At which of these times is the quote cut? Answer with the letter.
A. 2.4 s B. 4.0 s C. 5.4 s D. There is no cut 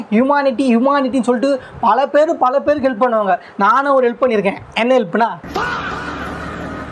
C